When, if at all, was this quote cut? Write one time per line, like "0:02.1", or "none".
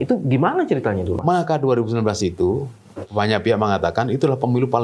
0:01.2